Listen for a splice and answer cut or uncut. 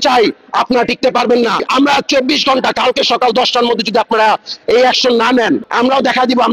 cut